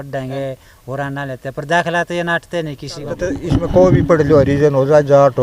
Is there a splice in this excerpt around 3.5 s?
yes; 1 cut; at 3.5 s

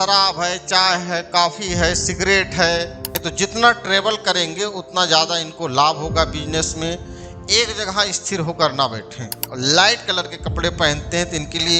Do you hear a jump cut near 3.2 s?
yes; 2 cuts; at 3.2 s, 9.4 s

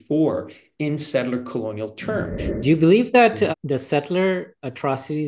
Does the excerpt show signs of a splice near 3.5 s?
yes; 2 cuts; at 2.4 s, 3.5 s

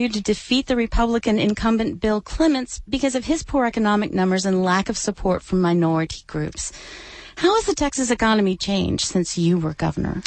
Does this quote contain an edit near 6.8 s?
no; 1 cut; at 5.4 s

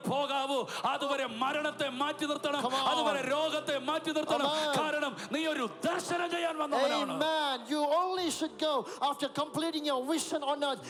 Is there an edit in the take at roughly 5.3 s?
no; 0 cuts

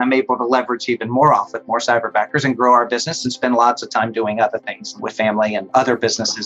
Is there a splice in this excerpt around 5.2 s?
yes; 1 cut; at 5.2 s

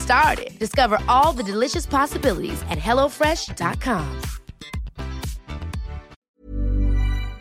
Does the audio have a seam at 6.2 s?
yes; 1 cut; at 6.2 s

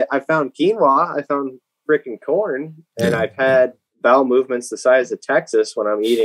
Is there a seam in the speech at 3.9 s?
yes; 1 cut; at 3.9 s

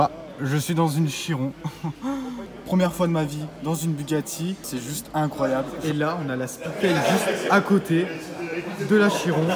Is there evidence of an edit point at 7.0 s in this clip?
no; 3 cuts; at 2.5 s, 4.7 s, 5.7 s

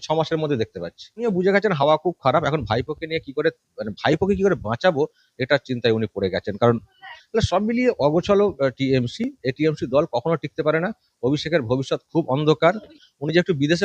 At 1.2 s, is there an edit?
yes; 3 cuts; at 1.2 s, 7.2 s, 12.9 s

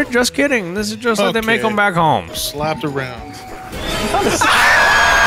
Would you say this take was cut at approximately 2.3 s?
yes; 1 cut; at 2.3 s

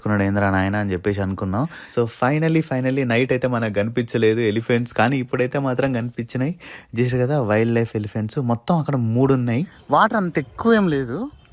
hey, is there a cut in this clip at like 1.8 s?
yes; 2 cuts; at 1.8 s, 9.8 s

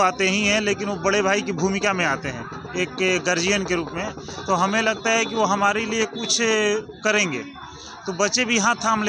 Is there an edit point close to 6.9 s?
no; 0 cuts

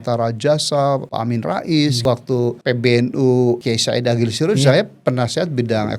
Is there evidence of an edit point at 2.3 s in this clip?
yes; 3 cuts; at 1.1 s, 2.3 s, 3.6 s

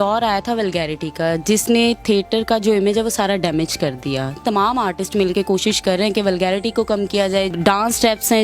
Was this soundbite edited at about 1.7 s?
no; 2 cuts; at 4.4 s, 7.5 s

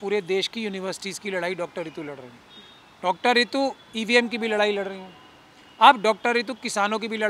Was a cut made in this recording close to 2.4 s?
no; 0 cuts

